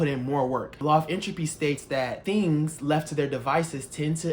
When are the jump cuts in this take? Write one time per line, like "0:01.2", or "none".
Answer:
0:00.8
0:02.2